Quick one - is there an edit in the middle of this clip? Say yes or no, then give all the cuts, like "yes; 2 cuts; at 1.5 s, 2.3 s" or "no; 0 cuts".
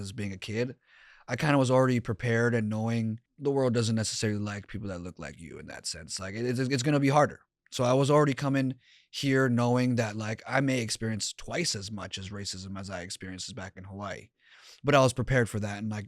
yes; 1 cut; at 3.3 s